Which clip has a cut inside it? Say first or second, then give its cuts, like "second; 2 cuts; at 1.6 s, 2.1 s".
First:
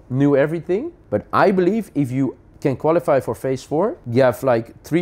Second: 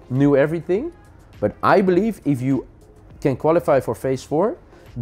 first; 3 cuts; at 1.0 s, 2.5 s, 4.0 s